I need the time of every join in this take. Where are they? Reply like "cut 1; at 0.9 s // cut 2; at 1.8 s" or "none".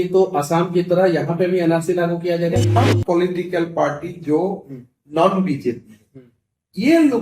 cut 1; at 2.7 s